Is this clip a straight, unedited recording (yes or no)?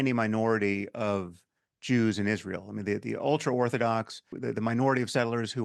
no